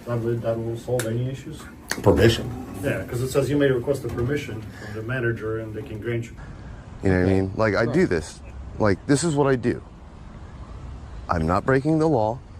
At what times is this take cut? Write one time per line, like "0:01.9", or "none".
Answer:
0:06.4